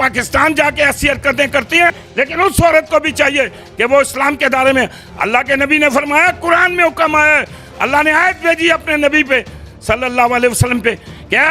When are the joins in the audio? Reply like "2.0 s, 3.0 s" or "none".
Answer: 2.0 s

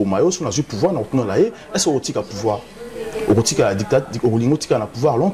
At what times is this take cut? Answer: none

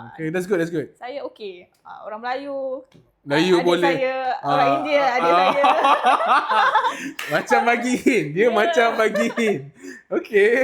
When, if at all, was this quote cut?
none

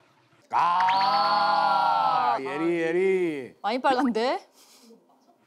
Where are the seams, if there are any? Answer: none

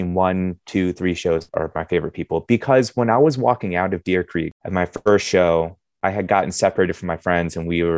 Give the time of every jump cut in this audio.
1.5 s, 4.6 s

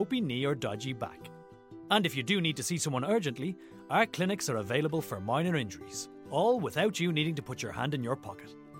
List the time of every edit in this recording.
none

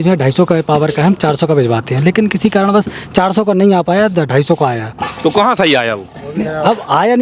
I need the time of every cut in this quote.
none

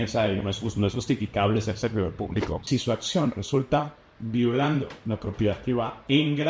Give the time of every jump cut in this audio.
2.7 s

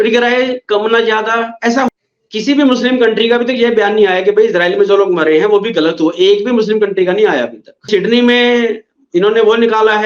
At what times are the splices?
1.9 s, 7.9 s

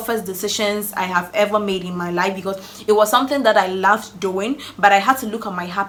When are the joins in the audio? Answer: none

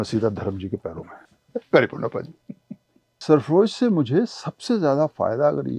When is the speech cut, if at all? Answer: 1.2 s, 3.2 s

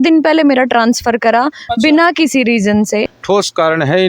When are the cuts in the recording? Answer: 3.1 s

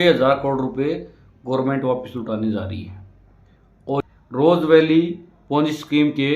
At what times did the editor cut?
4.0 s

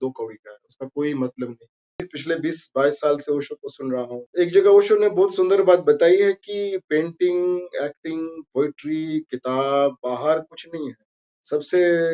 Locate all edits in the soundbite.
2.1 s, 4.3 s

